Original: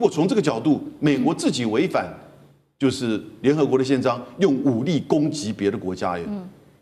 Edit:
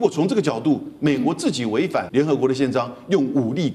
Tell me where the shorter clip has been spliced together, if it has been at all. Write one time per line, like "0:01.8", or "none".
0:02.1